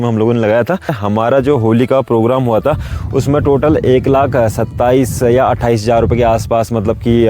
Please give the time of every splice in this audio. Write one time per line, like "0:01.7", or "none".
0:01.0